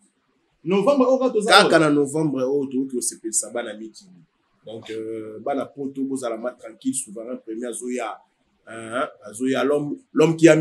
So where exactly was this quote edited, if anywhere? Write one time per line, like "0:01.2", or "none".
none